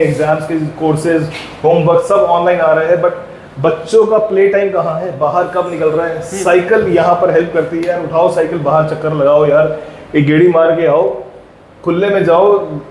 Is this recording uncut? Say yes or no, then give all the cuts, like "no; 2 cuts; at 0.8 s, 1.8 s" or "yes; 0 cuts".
yes; 0 cuts